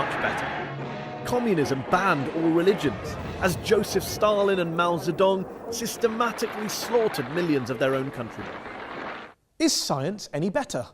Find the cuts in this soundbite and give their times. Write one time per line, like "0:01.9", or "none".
0:02.5